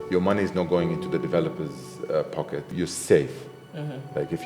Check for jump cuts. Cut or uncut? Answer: cut